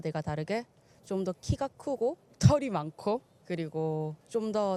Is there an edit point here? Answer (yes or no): no